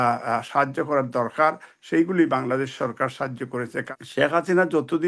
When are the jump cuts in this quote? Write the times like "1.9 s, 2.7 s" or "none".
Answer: 3.8 s